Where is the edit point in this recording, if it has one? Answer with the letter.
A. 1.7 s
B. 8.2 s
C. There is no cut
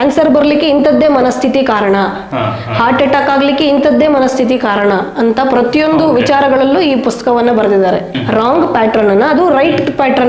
B